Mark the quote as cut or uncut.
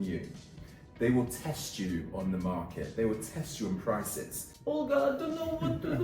cut